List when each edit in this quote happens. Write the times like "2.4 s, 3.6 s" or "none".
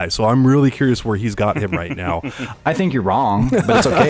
2.4 s